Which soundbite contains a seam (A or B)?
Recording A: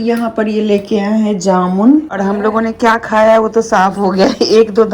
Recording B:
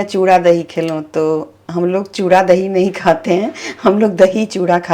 A